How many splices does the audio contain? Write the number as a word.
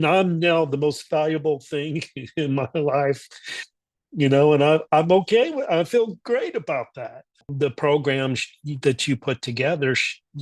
one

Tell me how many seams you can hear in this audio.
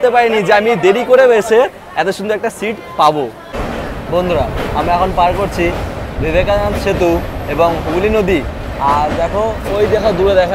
one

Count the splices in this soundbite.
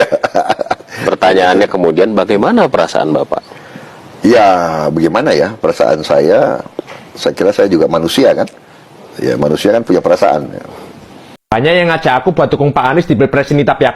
one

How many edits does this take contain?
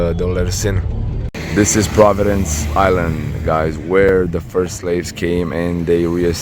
one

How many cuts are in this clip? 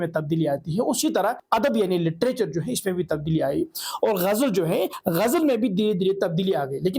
two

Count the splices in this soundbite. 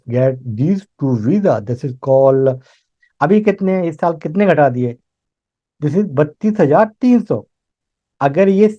one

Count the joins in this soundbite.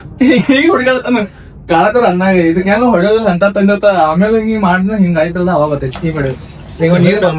zero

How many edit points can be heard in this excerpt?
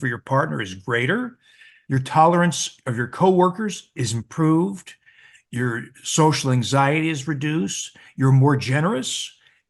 one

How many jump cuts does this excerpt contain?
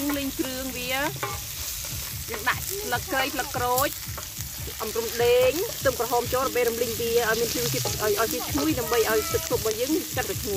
zero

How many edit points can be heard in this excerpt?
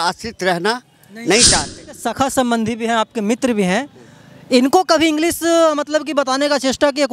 one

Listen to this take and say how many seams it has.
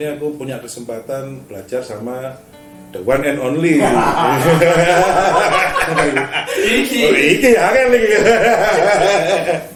zero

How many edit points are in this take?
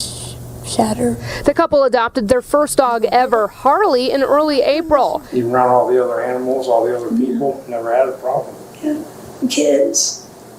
two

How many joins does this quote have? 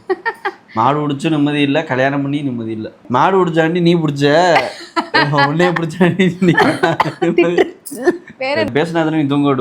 two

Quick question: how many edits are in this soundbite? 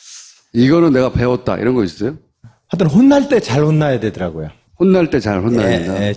one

